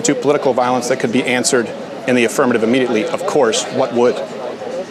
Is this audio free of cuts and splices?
yes; 0 cuts

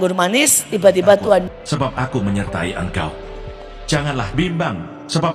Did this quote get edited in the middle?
yes; 1 cut; at 1.5 s

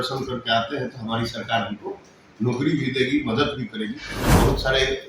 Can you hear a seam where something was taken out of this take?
yes; 1 cut; at 4.1 s

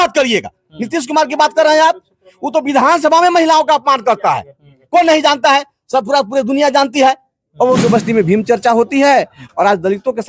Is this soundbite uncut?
no; 1 cut; at 7.8 s

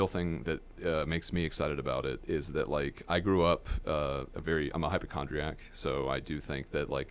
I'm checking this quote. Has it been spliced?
no; 0 cuts

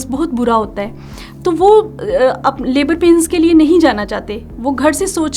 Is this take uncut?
yes; 0 cuts

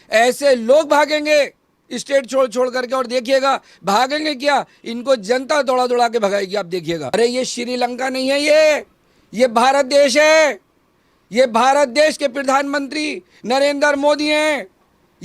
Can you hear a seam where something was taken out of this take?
yes; 1 cut; at 7.1 s

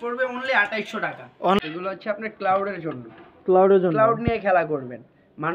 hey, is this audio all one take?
no; 1 cut; at 1.6 s

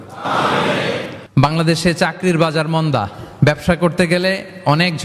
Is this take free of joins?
no; 1 cut; at 1.2 s

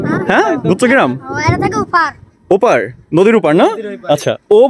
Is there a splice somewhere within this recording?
no; 0 cuts

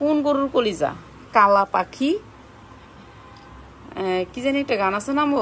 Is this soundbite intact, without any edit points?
yes; 0 cuts

